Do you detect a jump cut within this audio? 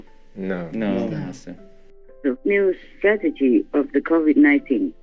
yes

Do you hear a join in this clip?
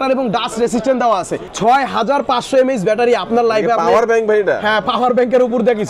yes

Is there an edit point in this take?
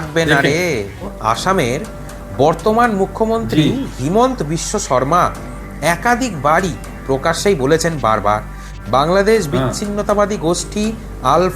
yes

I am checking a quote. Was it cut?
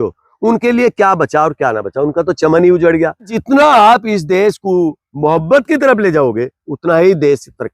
yes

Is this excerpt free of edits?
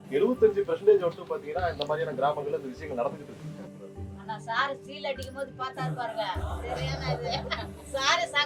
yes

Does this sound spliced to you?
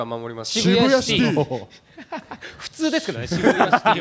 no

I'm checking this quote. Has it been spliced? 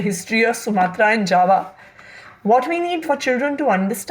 yes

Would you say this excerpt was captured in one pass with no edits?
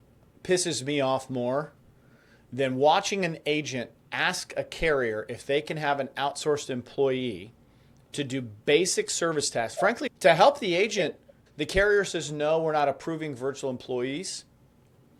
yes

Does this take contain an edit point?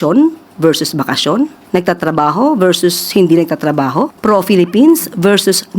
yes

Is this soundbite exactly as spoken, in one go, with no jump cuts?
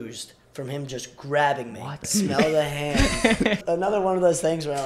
no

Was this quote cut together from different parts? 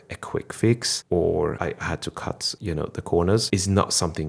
yes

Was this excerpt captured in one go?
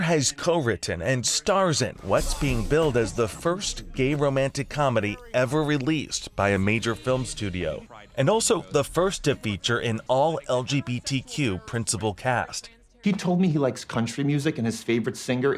no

